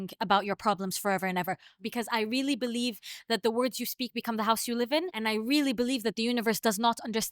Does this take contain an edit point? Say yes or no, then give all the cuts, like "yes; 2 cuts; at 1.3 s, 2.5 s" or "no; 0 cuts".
yes; 2 cuts; at 1.7 s, 5.1 s